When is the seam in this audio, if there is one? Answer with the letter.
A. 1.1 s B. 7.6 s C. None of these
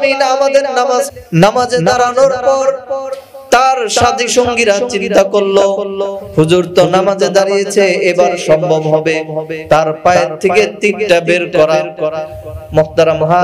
A